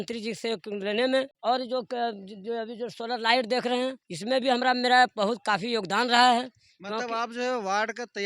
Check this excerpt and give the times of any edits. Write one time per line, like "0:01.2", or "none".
0:01.3
0:04.1